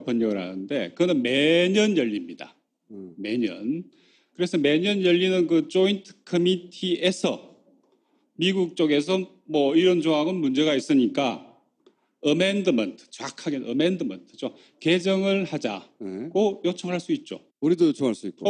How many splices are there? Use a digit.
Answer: 1